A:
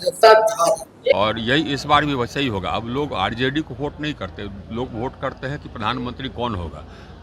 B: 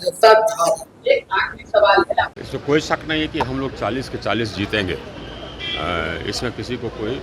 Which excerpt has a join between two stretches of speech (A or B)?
A